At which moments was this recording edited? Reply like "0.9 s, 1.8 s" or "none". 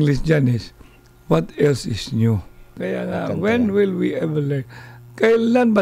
2.8 s